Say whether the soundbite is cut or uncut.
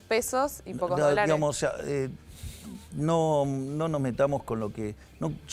uncut